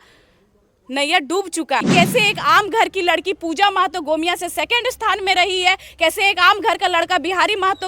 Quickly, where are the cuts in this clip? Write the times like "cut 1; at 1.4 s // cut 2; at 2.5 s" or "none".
cut 1; at 1.9 s